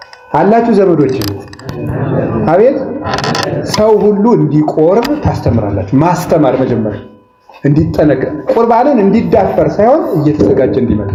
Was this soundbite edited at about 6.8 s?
no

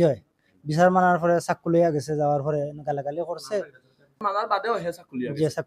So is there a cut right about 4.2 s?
yes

